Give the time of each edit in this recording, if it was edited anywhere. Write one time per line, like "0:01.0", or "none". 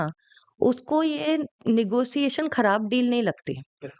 none